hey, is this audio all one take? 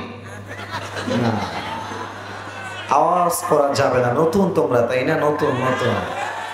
yes; 0 cuts

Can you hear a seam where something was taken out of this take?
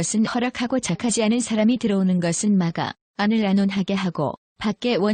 yes; 1 cut; at 2.9 s

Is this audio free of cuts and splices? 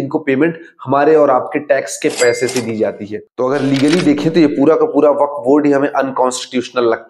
no; 1 cut; at 3.2 s

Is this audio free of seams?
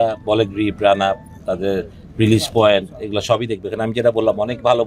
yes; 0 cuts

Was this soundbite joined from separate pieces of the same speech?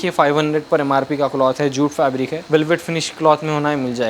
yes; 1 cut; at 2.4 s

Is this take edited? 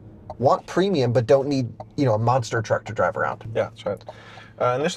no; 0 cuts

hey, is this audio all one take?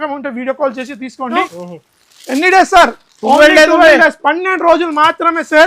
no; 1 cut; at 1.4 s

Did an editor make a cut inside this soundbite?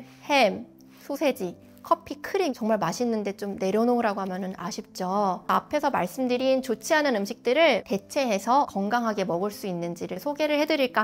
no; 0 cuts

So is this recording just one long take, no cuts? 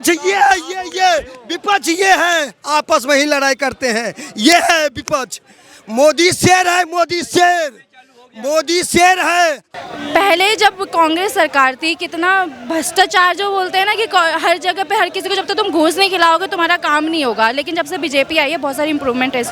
no; 1 cut; at 9.7 s

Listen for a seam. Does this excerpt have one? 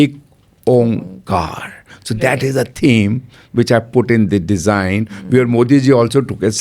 no; 0 cuts

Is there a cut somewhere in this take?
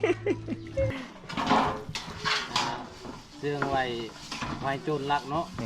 yes; 1 cut; at 0.9 s

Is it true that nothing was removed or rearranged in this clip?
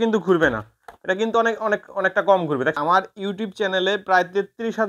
no; 1 cut; at 2.8 s

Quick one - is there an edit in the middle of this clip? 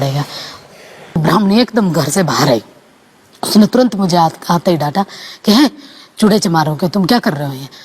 yes; 1 cut; at 1.2 s

